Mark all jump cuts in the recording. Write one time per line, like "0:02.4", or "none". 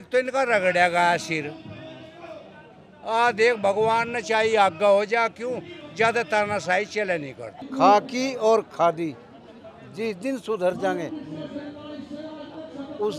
0:07.6